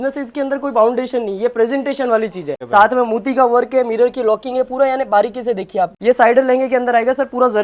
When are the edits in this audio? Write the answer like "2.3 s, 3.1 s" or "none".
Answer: 2.5 s, 6.0 s